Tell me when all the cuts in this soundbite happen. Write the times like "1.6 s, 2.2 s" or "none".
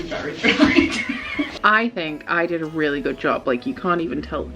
1.5 s